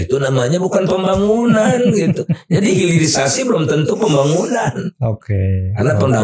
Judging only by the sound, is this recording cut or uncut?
uncut